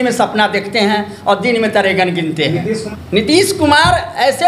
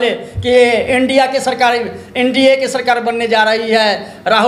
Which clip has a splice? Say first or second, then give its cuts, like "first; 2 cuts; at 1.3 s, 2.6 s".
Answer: first; 1 cut; at 2.9 s